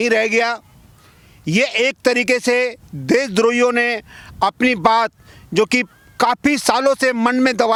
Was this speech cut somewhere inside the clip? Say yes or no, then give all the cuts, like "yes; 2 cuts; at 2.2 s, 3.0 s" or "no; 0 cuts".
no; 0 cuts